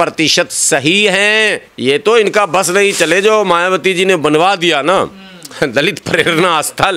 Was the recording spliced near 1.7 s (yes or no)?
yes